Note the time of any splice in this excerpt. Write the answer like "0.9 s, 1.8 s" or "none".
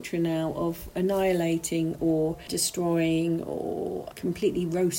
4.1 s